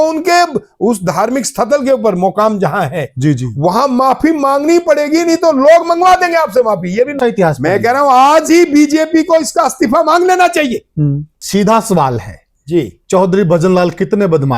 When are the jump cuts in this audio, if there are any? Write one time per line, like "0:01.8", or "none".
0:07.2
0:11.3